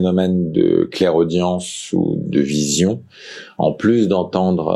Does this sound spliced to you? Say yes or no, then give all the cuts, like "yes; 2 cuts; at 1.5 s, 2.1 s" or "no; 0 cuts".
no; 0 cuts